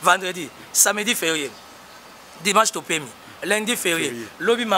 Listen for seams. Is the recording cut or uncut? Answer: uncut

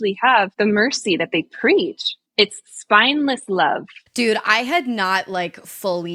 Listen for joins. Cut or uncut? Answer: uncut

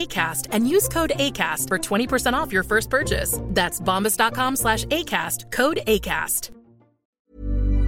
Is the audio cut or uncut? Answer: cut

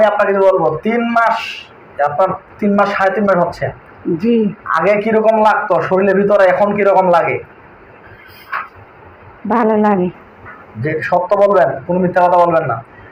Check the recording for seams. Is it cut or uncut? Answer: uncut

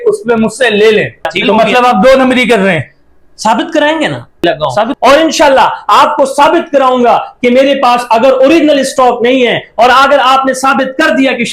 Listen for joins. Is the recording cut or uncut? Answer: cut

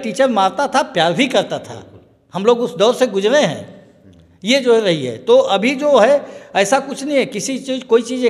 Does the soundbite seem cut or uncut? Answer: uncut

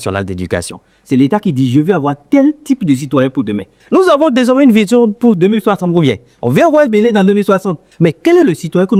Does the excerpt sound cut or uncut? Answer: uncut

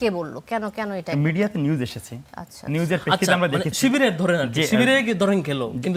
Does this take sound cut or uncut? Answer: uncut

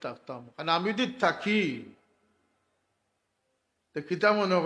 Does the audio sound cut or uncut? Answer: uncut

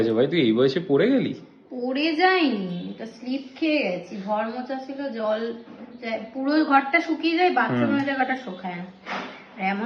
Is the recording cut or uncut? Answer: uncut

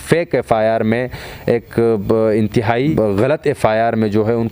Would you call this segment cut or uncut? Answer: cut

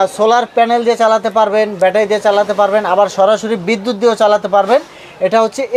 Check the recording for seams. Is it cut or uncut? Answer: uncut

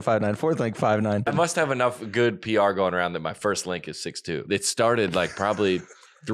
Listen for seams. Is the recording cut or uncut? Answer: cut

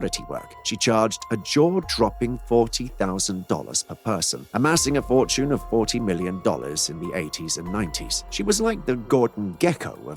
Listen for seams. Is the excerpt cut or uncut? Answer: uncut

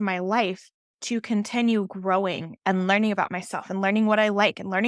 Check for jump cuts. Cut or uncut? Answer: cut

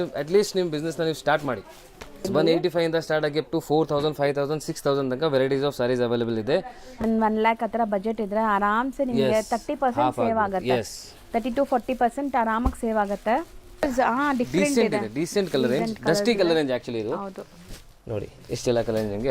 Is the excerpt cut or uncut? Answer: cut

